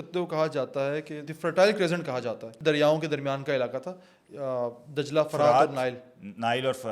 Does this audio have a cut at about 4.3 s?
no; 2 cuts; at 1.2 s, 2.5 s

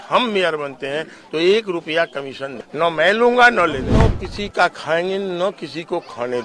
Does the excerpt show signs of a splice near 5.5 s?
no; 2 cuts; at 2.6 s, 4.1 s

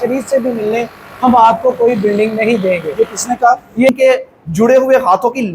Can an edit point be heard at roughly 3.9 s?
yes; 1 cut; at 3.9 s

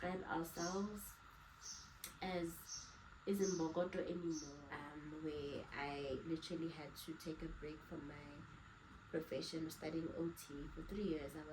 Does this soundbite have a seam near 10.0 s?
no; 1 cut; at 4.6 s

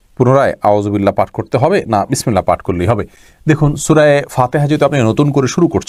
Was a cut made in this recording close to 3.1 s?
no; 0 cuts

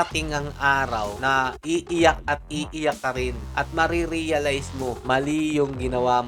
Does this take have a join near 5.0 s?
yes; 3 cuts; at 1.3 s, 3.4 s, 5.0 s

